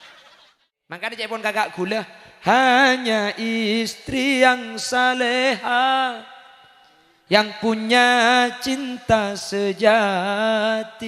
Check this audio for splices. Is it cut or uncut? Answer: cut